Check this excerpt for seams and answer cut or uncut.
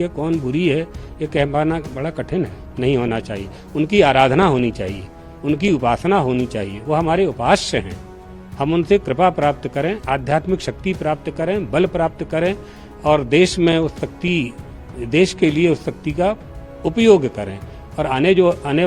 cut